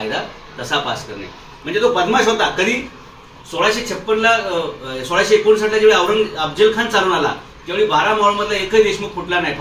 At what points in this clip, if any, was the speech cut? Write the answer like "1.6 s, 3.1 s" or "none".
1.5 s